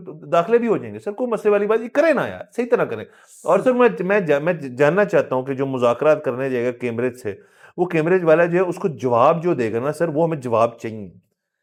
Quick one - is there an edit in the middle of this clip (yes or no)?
no